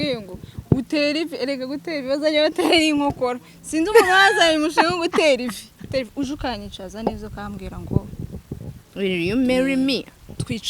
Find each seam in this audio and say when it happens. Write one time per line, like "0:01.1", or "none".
0:05.9